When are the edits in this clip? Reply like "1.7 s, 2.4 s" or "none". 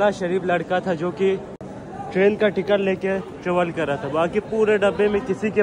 none